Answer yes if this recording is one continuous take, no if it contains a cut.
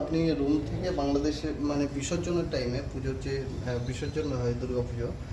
yes